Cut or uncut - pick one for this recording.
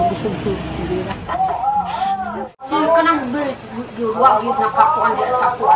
cut